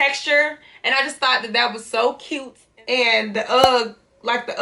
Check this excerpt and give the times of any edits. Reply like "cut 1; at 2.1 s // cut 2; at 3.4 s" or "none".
cut 1; at 2.6 s